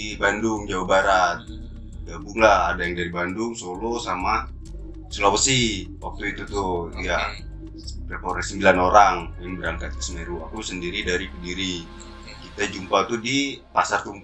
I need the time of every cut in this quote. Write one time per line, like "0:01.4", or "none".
none